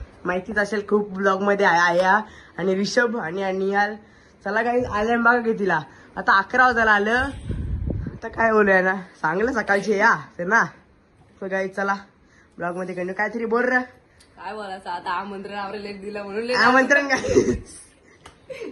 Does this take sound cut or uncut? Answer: uncut